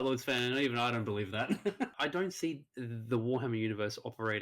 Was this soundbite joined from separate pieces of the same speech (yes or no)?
yes